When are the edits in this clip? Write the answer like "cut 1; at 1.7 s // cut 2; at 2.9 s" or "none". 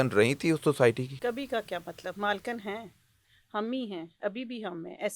cut 1; at 1.1 s